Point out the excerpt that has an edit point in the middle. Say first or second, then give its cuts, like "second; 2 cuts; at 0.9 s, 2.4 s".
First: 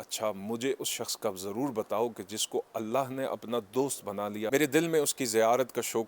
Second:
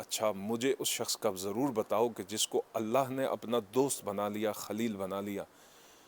first; 1 cut; at 4.5 s